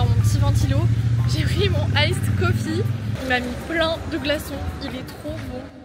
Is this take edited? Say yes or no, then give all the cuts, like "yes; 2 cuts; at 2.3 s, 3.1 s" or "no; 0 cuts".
no; 0 cuts